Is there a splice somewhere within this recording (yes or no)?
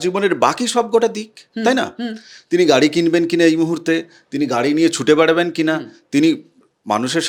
no